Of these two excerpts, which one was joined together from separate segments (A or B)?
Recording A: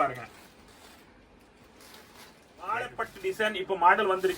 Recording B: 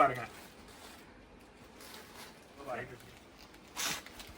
A